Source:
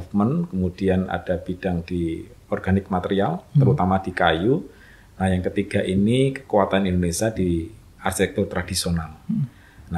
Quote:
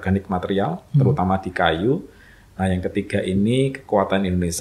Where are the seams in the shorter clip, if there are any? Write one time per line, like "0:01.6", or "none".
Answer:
none